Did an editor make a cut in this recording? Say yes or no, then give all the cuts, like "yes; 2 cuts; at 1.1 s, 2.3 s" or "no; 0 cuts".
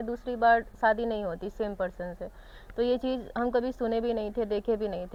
no; 0 cuts